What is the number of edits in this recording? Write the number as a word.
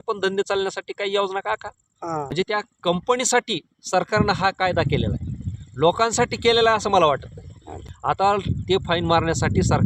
two